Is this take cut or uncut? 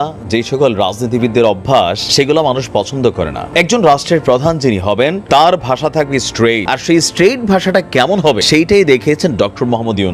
cut